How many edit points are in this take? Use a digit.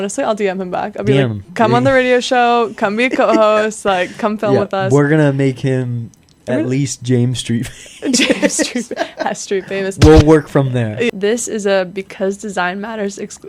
1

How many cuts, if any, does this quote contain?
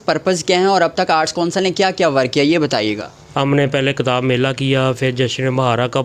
1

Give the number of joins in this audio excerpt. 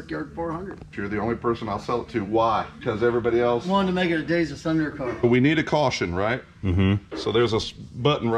3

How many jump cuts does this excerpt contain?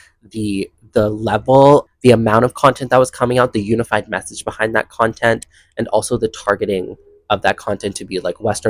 1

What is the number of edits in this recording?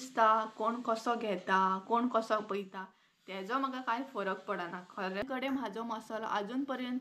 1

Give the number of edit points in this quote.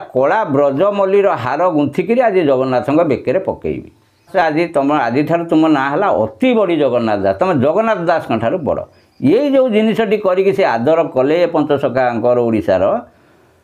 1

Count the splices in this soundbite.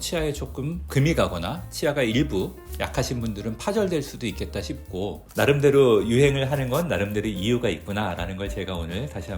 1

